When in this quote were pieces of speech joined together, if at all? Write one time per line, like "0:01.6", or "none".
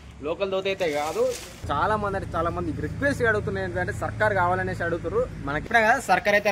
0:01.5
0:05.6